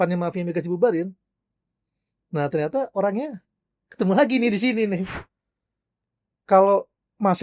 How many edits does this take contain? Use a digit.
1